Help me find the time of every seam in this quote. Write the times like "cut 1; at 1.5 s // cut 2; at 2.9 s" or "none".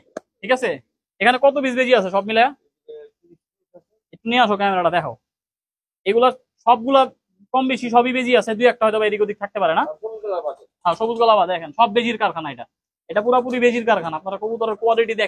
none

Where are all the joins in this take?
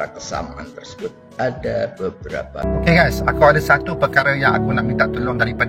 cut 1; at 2.5 s

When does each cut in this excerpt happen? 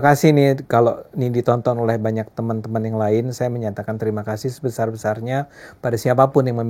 none

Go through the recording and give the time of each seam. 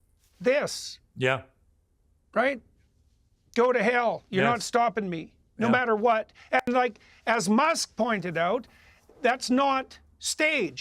cut 1; at 4.5 s

